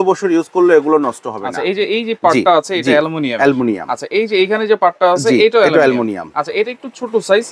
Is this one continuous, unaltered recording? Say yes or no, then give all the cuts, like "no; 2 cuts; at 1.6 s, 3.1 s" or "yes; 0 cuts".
yes; 0 cuts